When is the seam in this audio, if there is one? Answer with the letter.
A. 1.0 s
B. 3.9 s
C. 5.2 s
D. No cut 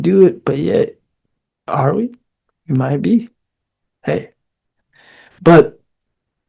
D